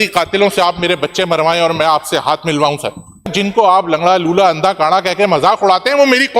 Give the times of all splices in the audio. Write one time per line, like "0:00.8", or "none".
0:03.3